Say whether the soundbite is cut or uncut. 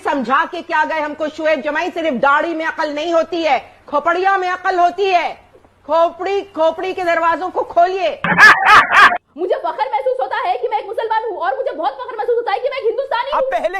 cut